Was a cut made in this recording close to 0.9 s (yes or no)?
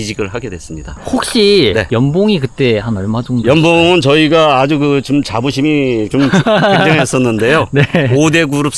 yes